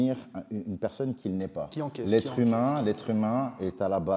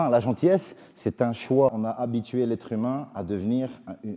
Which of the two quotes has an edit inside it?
second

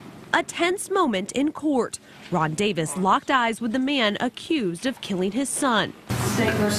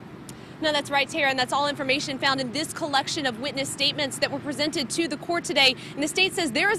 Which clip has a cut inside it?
first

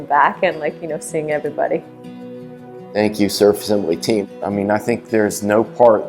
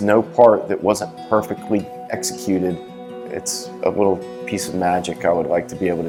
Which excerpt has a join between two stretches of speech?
first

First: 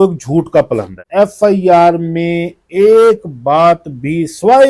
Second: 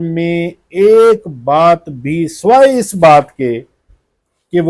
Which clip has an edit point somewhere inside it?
first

